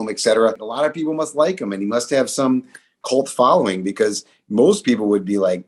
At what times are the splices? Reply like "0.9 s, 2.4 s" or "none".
none